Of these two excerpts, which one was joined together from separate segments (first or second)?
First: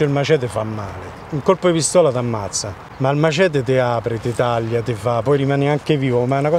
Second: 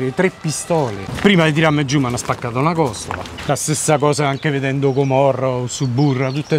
second